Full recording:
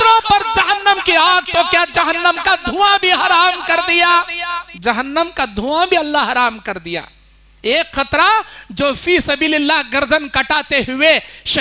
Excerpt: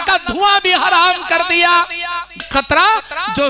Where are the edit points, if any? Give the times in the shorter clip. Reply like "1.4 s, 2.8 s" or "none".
2.4 s